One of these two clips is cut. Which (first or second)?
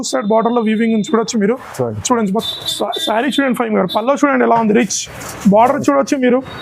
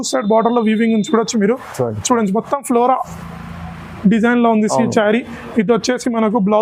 first